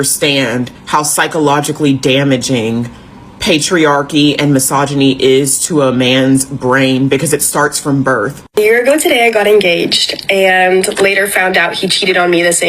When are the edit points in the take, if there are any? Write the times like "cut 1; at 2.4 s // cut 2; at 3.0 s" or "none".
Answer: cut 1; at 8.5 s